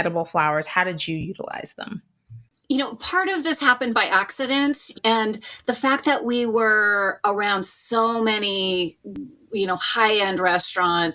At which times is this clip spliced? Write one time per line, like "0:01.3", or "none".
0:02.6